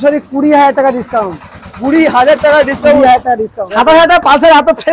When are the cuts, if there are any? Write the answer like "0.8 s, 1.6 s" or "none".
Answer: 3.6 s